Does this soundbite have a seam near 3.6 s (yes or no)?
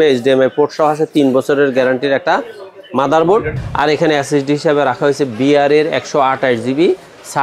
yes